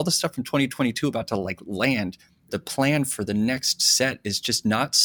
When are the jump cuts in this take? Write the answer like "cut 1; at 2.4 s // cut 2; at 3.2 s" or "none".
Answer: cut 1; at 2.5 s